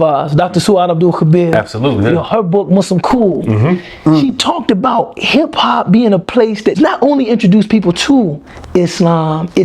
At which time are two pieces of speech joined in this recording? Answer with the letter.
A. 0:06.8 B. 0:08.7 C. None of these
A